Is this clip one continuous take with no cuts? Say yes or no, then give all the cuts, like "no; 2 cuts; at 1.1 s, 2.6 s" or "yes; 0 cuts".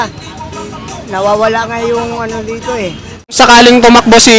no; 1 cut; at 3.4 s